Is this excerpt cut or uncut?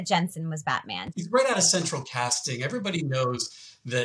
cut